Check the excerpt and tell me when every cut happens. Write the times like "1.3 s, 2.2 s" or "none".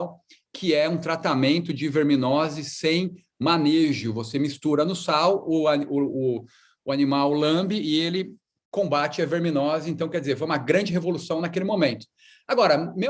none